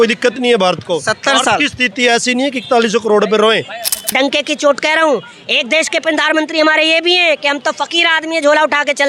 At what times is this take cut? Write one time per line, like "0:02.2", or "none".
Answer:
0:04.1